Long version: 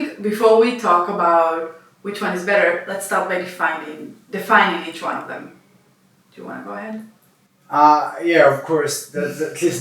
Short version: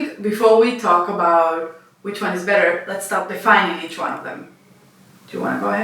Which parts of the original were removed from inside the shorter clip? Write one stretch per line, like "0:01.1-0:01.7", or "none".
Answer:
0:03.3-0:04.3